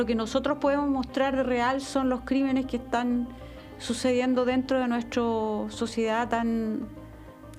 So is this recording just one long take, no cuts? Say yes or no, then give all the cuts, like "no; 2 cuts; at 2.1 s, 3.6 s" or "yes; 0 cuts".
yes; 0 cuts